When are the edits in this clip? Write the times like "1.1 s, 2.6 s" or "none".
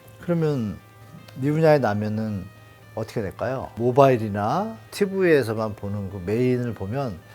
3.7 s, 4.8 s